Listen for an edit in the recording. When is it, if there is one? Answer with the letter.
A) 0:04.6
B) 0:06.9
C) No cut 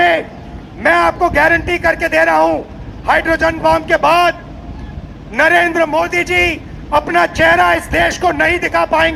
C